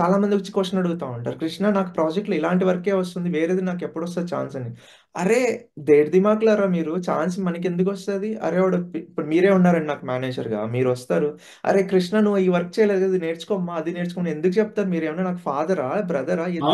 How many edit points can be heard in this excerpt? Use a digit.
0